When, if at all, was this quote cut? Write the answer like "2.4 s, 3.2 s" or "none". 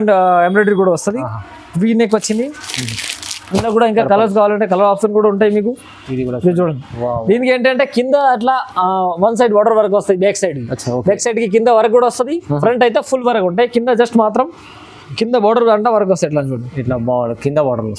none